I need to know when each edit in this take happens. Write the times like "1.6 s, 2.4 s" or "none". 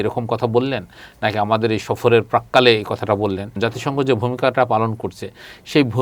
3.6 s